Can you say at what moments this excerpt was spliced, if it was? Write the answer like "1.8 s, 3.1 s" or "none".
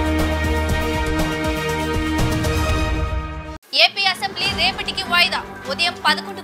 none